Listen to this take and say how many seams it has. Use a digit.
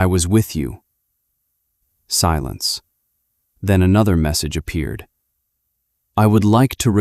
1